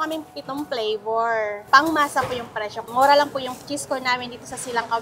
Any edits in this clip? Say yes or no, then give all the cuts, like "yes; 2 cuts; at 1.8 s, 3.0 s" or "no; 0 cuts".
no; 0 cuts